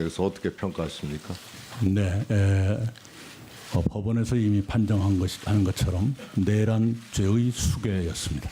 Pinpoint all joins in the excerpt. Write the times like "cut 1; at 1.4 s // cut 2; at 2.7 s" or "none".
cut 1; at 3.8 s